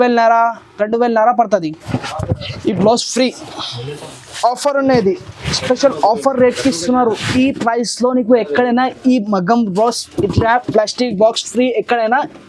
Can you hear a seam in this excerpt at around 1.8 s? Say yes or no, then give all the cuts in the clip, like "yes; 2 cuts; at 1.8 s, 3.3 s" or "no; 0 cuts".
yes; 1 cut; at 1.8 s